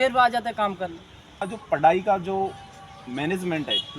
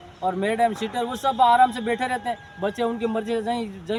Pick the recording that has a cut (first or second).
first